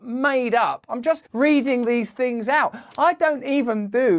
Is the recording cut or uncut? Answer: uncut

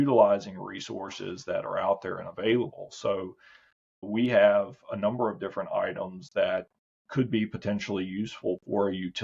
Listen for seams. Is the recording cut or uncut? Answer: cut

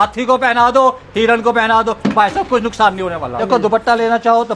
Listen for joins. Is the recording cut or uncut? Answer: cut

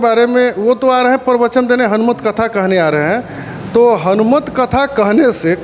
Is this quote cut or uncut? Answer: uncut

